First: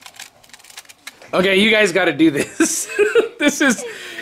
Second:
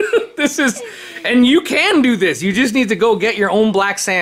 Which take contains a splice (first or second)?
first